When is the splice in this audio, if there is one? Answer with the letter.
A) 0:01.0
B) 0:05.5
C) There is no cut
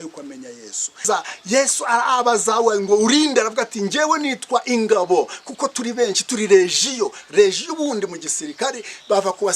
A